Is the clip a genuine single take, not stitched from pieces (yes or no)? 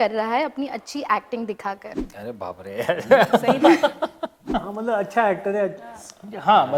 no